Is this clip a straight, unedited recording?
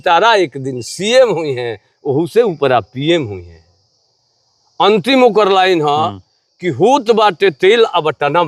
yes; 0 cuts

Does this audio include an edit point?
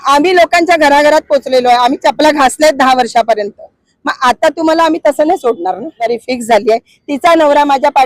yes; 1 cut; at 6.0 s

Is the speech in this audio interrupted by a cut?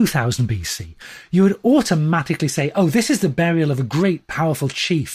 no; 0 cuts

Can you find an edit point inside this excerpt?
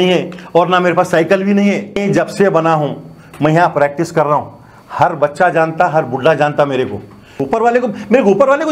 yes; 2 cuts; at 2.0 s, 7.3 s

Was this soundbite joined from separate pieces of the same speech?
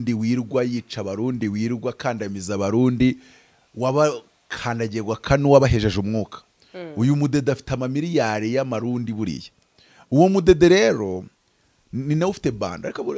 no; 0 cuts

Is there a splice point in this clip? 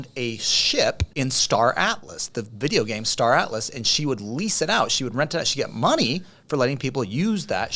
yes; 1 cut; at 1.0 s

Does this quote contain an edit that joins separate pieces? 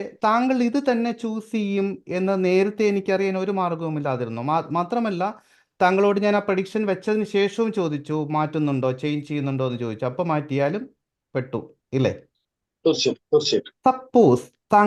no; 0 cuts

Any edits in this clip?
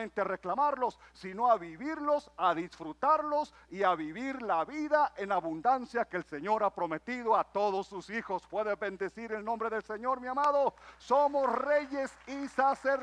no; 0 cuts

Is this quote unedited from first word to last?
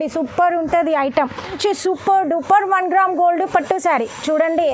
no; 1 cut; at 1.5 s

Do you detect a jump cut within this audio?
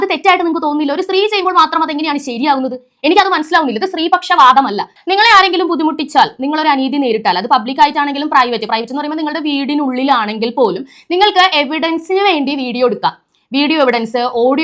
yes; 1 cut; at 4.9 s

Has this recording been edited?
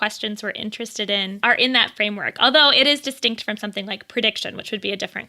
yes; 1 cut; at 1.4 s

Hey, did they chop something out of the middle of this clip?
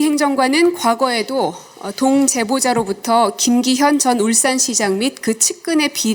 no; 0 cuts

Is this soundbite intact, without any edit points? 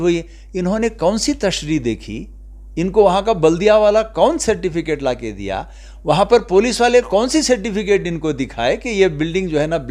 yes; 0 cuts

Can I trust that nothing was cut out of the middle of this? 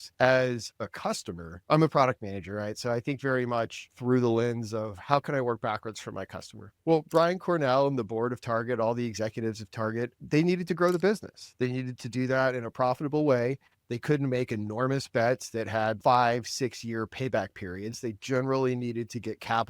no; 1 cut; at 16.0 s

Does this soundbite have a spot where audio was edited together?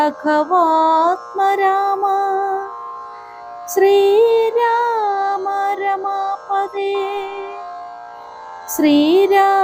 yes; 2 cuts; at 7.5 s, 8.8 s

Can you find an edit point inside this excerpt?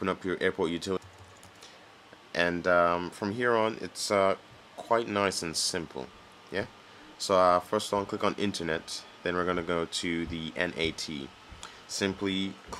yes; 1 cut; at 1.0 s

